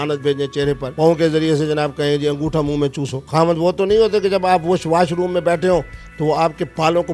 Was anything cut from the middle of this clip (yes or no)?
no